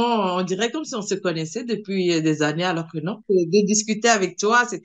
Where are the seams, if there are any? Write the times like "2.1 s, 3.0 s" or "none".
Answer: 3.2 s

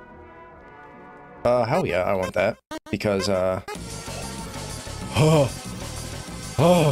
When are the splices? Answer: 1.2 s

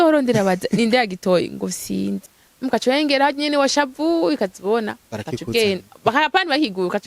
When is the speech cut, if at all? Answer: 2.3 s

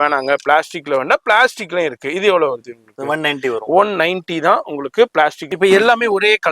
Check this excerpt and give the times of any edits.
5.4 s

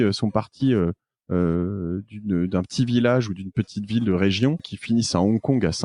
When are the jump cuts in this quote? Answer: 4.7 s

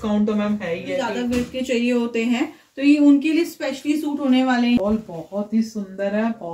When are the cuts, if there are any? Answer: 1.1 s, 4.8 s

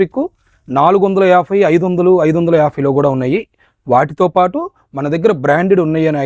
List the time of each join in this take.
none

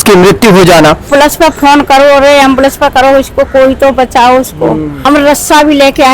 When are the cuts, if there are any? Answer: 1.1 s, 4.9 s

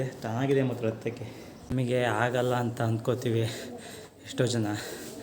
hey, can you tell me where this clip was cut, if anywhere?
1.7 s

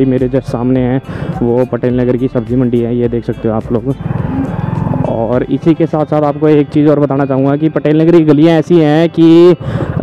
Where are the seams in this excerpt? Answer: none

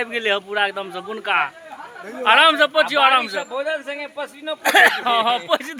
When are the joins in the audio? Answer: none

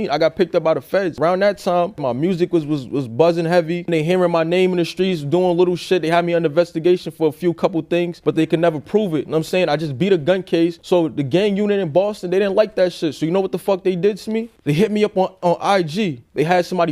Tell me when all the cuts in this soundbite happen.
1.2 s, 3.9 s, 15.3 s

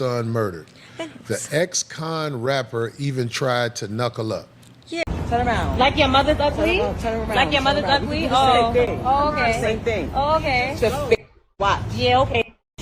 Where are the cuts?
5.0 s

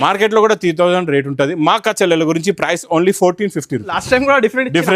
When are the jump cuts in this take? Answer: 4.0 s

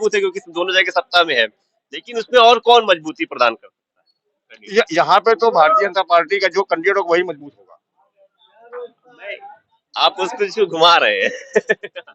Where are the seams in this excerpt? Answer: none

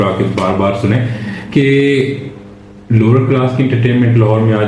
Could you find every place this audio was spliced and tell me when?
none

